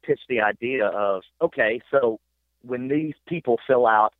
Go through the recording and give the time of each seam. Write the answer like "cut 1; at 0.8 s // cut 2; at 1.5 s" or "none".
cut 1; at 1.3 s